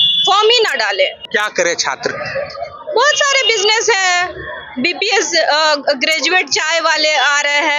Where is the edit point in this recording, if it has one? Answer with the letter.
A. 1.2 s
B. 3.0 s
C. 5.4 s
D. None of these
A